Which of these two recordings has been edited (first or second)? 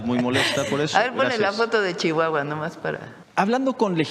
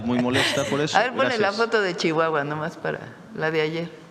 first